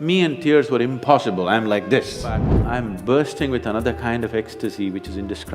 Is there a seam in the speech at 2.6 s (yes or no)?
yes